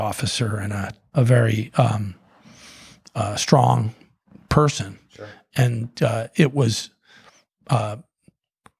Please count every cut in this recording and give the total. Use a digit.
1